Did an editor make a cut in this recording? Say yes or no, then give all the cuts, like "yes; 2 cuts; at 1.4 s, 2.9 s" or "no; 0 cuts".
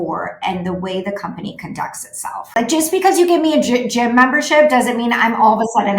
yes; 1 cut; at 2.5 s